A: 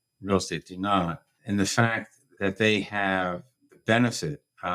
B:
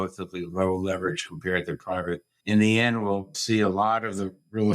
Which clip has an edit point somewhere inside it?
B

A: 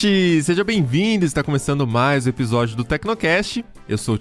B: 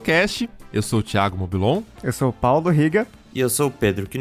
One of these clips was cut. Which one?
B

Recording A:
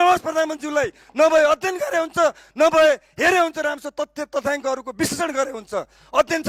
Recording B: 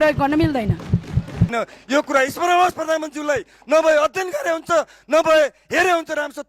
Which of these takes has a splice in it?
B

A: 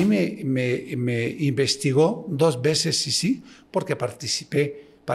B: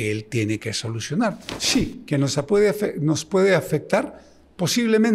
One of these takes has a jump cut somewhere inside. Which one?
B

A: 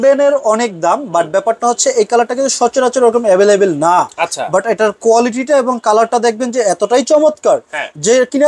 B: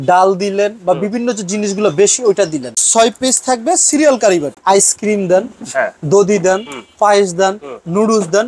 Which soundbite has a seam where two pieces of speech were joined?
B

